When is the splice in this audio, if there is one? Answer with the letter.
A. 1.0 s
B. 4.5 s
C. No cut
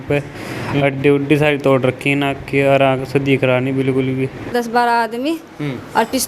B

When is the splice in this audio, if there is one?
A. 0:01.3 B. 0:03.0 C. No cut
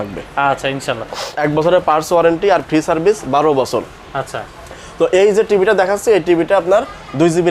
A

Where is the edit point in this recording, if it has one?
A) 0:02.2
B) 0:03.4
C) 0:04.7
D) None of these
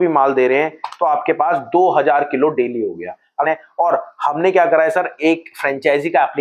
B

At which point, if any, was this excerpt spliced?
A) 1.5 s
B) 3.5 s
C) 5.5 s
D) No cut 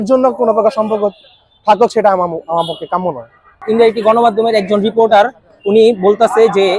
B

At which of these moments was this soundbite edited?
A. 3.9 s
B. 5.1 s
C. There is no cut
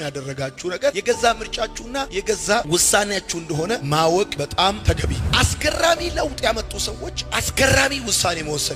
B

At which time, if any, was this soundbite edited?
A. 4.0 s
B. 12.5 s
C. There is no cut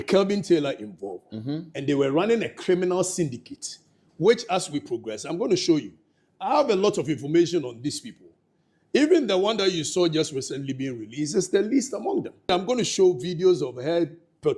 B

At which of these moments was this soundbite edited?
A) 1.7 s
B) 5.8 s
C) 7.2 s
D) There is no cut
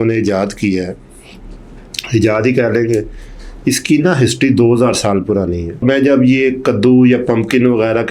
B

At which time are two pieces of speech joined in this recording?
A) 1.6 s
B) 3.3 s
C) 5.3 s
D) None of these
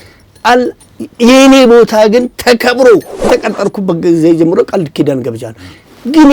B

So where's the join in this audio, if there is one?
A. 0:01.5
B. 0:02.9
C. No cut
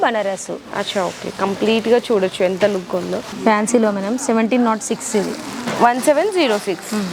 C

